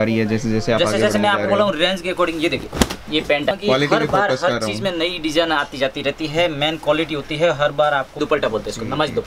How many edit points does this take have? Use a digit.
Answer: 2